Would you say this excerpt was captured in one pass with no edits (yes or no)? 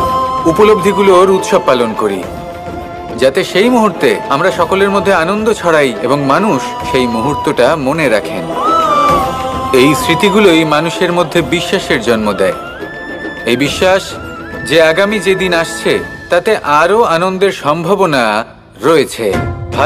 yes